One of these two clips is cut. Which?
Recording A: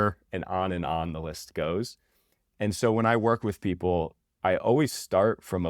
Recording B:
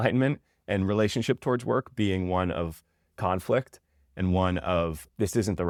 A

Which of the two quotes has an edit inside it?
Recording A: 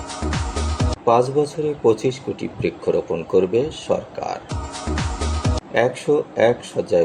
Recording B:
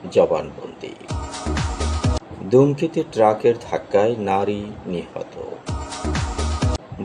A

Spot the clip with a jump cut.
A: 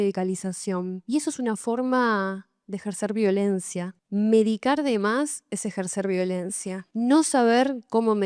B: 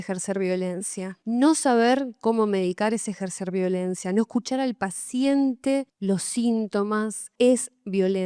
B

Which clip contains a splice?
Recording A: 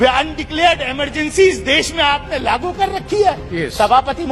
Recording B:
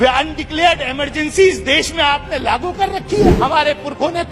B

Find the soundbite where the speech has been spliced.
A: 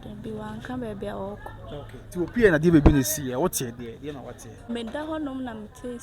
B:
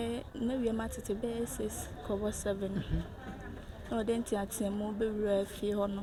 A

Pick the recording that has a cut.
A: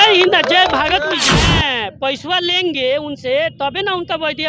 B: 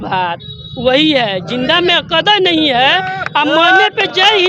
A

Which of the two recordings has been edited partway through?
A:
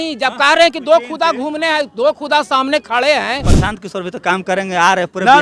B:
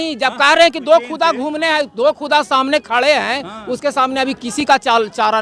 A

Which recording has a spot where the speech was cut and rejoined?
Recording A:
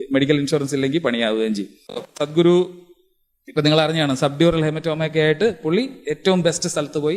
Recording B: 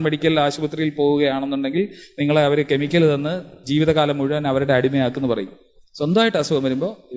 A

